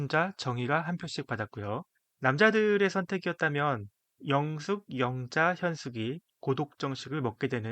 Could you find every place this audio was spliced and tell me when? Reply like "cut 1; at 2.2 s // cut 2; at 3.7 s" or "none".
cut 1; at 2.0 s